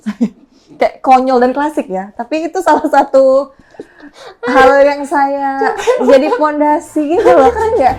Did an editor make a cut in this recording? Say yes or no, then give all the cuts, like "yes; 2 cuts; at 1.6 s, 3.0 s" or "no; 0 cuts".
no; 0 cuts